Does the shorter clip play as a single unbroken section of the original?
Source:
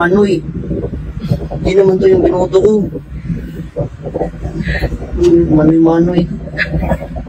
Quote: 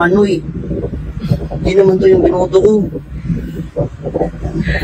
yes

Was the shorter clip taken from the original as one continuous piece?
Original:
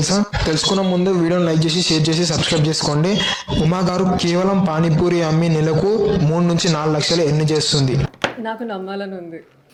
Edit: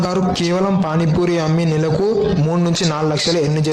yes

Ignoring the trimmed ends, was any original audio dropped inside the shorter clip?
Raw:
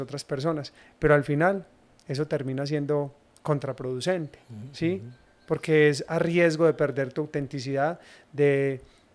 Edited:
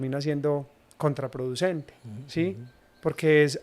no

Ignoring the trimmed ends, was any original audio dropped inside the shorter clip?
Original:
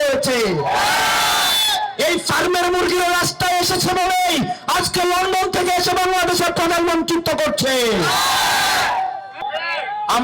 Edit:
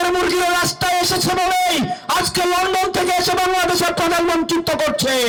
no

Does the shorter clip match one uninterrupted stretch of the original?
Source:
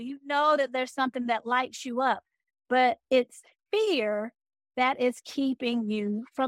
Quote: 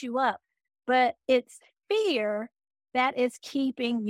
yes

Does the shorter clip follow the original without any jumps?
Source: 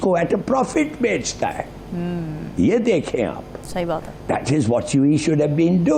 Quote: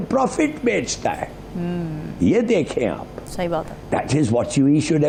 yes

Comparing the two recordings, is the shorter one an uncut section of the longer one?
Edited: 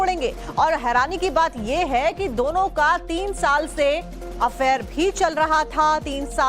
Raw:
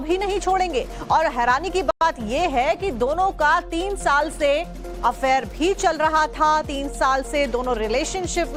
no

